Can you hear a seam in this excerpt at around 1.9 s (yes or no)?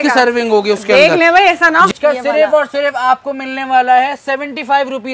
yes